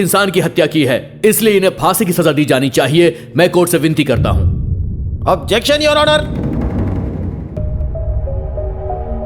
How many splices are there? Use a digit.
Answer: 1